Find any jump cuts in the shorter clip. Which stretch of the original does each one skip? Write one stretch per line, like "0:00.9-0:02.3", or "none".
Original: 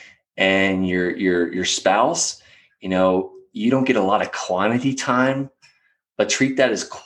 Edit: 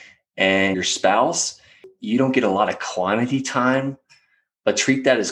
0:00.7-0:01.6
0:02.7-0:03.4